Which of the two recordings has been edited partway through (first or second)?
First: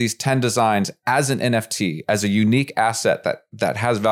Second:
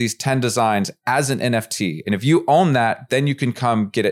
second